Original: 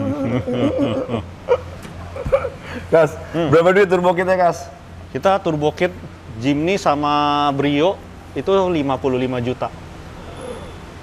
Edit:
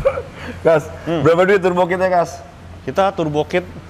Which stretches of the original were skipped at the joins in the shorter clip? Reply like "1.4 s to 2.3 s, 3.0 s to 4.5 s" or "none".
none